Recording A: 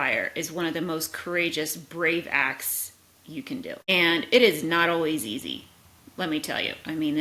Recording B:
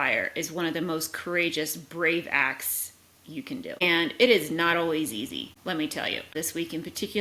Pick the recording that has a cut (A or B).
B